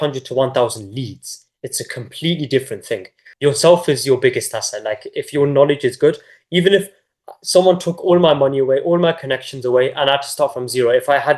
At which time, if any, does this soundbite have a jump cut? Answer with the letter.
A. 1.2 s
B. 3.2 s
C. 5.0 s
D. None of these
B